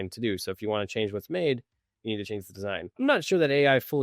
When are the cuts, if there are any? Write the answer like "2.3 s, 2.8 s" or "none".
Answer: 2.9 s